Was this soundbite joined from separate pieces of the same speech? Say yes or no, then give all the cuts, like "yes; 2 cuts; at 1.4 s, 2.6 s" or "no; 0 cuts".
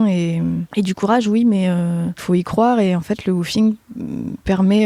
no; 0 cuts